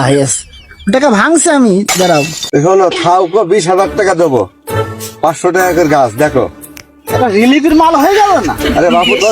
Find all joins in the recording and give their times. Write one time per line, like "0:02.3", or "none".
0:02.4